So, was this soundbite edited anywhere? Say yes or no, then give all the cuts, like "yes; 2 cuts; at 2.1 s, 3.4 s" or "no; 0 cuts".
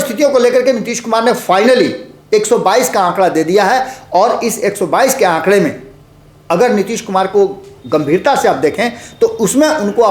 no; 0 cuts